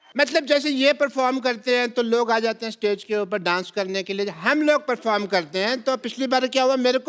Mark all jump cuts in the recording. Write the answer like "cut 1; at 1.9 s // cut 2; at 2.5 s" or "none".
none